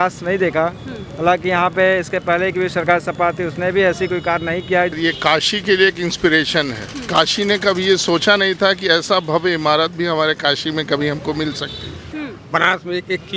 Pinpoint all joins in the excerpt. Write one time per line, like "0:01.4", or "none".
0:04.9
0:12.1